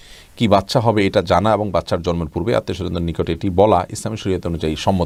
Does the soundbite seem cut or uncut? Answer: uncut